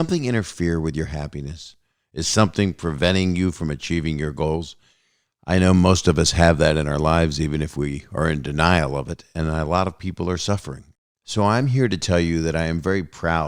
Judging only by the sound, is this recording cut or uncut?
uncut